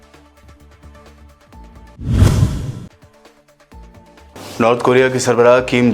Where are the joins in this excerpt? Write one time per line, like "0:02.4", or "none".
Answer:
0:01.4